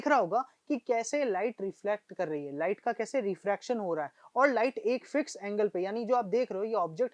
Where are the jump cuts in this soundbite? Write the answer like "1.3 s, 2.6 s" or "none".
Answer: none